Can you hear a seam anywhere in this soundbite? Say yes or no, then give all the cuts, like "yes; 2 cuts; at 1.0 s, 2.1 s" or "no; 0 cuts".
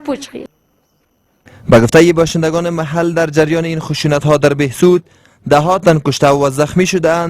yes; 1 cut; at 1.9 s